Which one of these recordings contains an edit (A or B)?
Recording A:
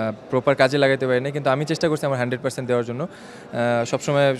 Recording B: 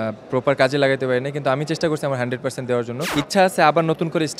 B